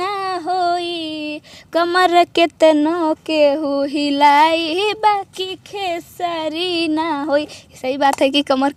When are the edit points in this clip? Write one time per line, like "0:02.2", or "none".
none